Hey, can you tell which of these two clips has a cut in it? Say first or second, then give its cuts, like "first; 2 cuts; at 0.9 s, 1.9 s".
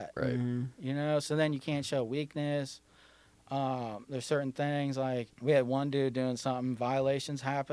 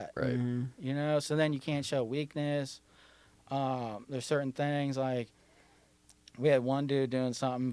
first; 1 cut; at 5.3 s